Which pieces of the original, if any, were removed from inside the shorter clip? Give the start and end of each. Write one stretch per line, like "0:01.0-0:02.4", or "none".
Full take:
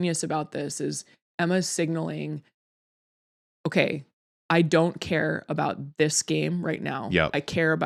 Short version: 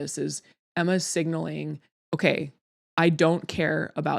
0:02.5-0:03.4